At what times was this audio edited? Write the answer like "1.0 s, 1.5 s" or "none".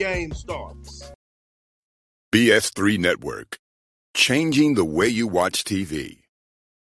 1.1 s